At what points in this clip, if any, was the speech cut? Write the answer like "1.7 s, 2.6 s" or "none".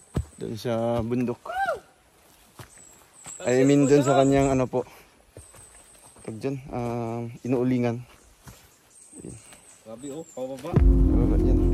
10.7 s